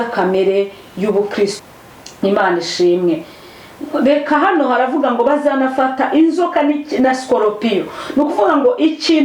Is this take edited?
yes; 1 cut; at 1.5 s

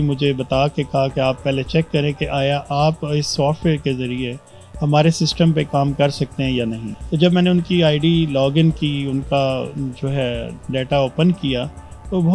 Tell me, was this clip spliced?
yes; 1 cut; at 6.9 s

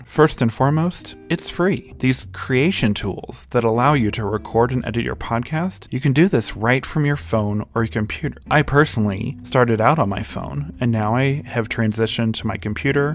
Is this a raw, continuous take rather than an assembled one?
yes; 0 cuts

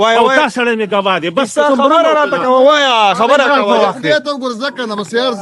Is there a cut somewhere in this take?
no; 0 cuts

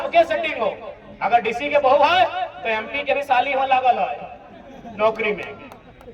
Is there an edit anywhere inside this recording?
no; 0 cuts

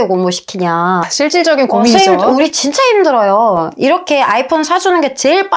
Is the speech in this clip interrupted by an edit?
no; 0 cuts

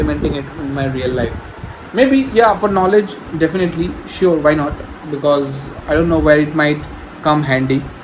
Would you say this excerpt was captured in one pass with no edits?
yes; 0 cuts

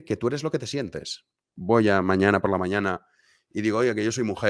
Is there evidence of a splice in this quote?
yes; 1 cut; at 1.5 s

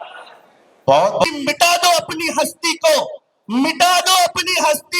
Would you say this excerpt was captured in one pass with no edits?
no; 1 cut; at 1.2 s

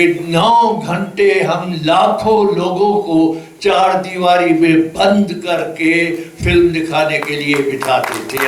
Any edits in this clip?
no; 0 cuts

